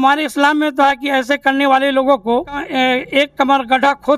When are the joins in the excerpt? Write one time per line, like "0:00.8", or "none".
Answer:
0:02.7